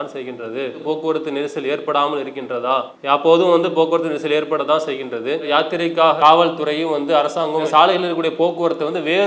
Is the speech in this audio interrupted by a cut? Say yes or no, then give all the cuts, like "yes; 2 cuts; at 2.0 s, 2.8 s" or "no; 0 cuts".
yes; 3 cuts; at 0.8 s, 2.9 s, 5.5 s